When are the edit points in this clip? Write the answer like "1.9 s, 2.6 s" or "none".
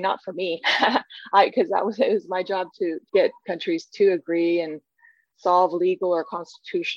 3.0 s